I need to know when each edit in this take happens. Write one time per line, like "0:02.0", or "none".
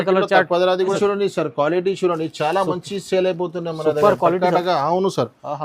0:01.0